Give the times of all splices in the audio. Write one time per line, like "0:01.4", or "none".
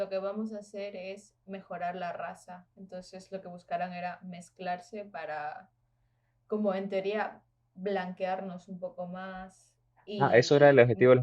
0:10.2